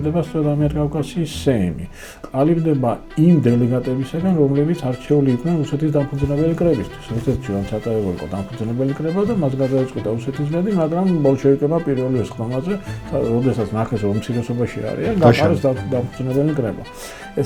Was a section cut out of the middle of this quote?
no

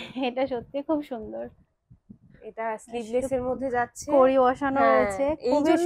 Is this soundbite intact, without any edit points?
yes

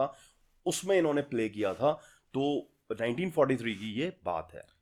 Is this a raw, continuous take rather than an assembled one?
yes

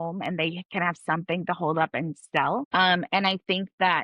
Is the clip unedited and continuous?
no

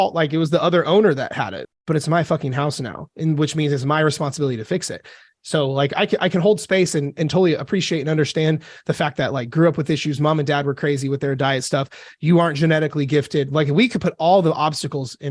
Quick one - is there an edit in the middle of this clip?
yes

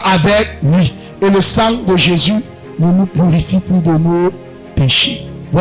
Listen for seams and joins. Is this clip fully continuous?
yes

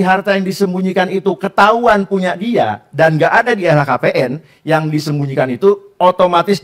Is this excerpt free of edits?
yes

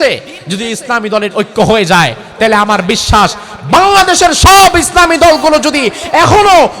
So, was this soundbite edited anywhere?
no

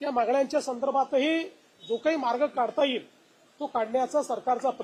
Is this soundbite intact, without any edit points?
yes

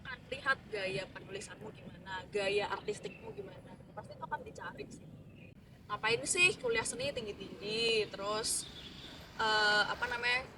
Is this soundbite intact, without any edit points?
no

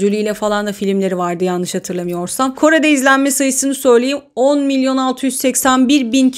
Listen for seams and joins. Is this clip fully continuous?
yes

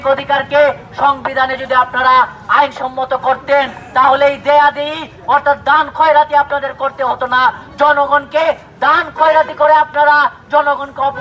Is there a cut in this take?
no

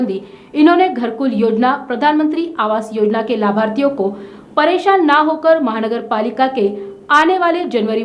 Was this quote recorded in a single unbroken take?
yes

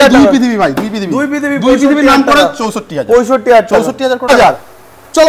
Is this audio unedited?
no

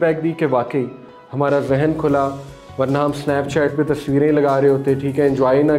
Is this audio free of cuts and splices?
yes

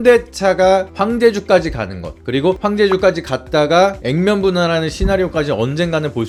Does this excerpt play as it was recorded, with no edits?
yes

